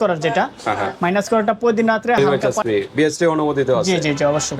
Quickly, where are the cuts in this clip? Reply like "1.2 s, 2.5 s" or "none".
2.2 s